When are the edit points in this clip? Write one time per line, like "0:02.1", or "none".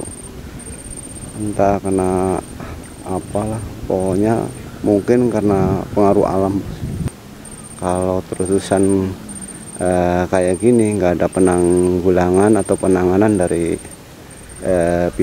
0:07.0